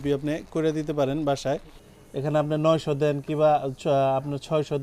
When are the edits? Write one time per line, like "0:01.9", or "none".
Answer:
0:01.7